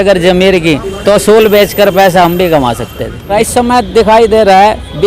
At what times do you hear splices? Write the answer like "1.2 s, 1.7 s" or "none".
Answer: 3.3 s